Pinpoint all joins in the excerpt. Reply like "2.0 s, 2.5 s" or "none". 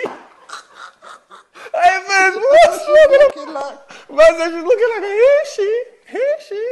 none